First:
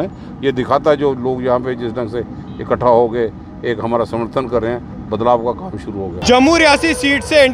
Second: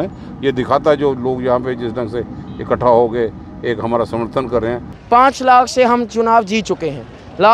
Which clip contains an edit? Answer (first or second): second